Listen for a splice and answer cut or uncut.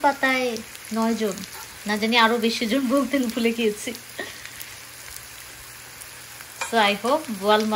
uncut